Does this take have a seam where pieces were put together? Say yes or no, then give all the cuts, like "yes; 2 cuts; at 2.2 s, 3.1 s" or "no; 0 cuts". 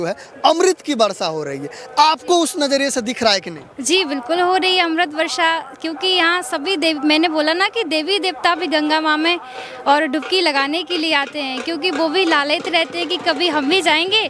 no; 0 cuts